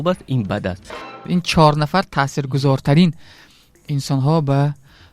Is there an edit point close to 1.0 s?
yes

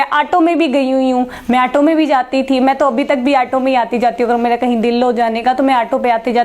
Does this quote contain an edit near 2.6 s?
no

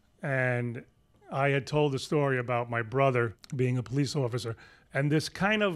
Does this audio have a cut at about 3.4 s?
yes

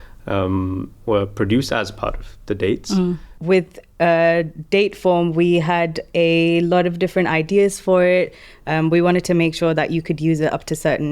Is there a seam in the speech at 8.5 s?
no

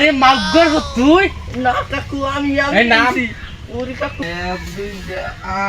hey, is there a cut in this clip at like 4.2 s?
yes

